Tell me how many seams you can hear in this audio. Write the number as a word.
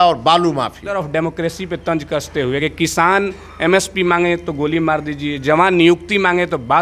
one